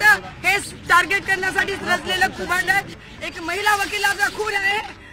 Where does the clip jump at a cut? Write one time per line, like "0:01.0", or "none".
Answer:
0:03.0